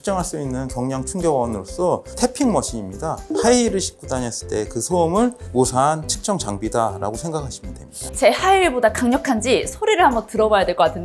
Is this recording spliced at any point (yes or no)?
no